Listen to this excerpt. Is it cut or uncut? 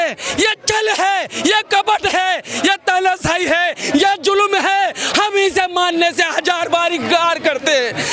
uncut